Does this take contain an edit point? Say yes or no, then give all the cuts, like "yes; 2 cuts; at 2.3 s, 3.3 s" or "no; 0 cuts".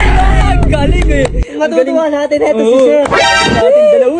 no; 0 cuts